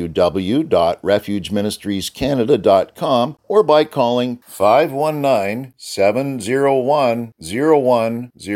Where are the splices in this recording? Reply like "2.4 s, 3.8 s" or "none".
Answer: 3.4 s